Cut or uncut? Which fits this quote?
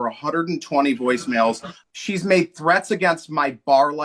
cut